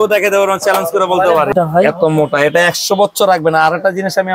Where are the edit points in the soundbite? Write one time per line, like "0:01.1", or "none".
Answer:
0:01.5